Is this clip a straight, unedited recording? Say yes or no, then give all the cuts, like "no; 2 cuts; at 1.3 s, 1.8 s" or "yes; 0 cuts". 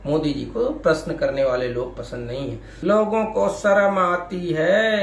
no; 1 cut; at 2.6 s